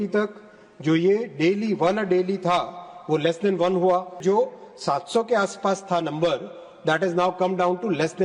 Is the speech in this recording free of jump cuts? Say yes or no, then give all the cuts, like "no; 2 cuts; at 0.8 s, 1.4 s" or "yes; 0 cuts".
no; 1 cut; at 4.2 s